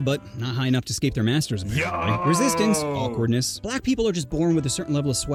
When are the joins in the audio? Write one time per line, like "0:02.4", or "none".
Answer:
none